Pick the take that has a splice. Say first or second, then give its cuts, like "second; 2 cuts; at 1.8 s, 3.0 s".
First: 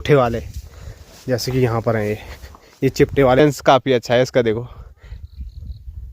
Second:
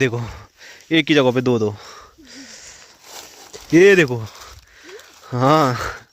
first; 1 cut; at 3.4 s